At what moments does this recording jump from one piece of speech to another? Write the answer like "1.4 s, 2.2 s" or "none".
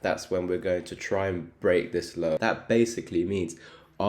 2.4 s